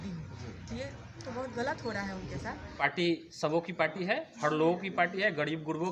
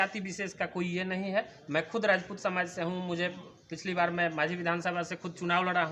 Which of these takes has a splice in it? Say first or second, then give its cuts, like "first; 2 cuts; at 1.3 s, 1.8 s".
first; 1 cut; at 2.8 s